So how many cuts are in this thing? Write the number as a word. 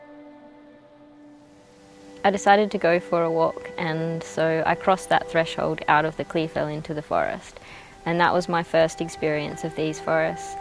one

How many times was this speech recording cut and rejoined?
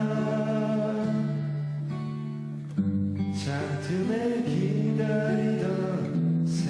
one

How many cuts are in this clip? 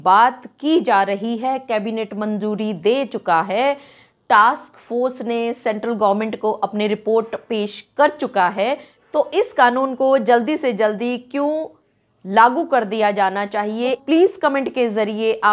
two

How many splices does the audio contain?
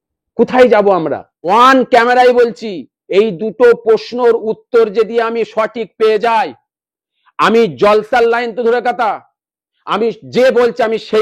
one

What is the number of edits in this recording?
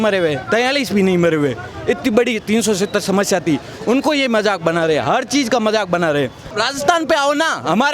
one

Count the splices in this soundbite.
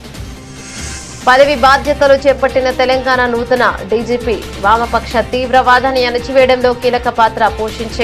one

